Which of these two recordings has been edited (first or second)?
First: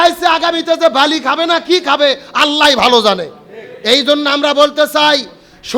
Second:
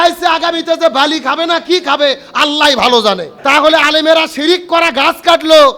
second